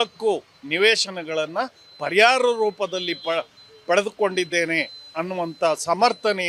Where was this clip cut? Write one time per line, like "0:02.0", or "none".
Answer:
none